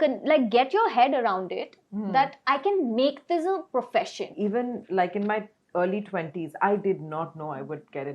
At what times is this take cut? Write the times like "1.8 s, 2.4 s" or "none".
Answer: 4.2 s